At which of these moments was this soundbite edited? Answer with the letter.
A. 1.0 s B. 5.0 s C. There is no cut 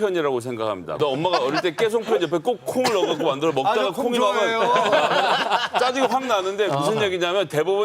A